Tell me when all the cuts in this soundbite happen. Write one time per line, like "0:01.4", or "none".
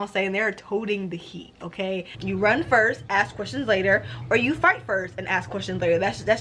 0:02.1